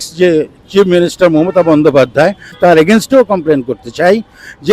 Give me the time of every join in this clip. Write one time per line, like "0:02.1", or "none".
0:02.6